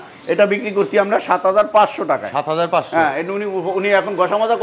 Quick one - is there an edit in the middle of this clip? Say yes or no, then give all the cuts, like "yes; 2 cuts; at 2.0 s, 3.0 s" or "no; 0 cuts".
no; 0 cuts